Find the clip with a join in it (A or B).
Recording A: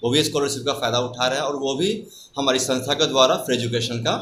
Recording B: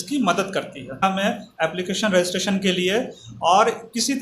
B